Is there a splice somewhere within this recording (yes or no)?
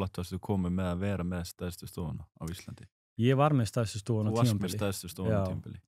no